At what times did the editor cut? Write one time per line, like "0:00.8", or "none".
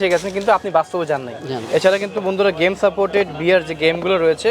0:01.6